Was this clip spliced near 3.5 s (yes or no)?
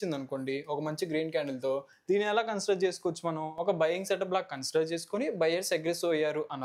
no